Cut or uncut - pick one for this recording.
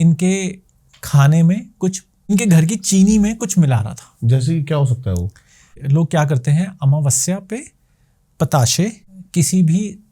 cut